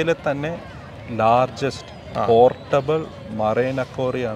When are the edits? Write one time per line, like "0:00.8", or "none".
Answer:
none